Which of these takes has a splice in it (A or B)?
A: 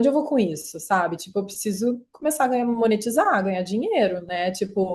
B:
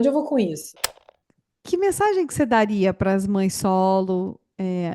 B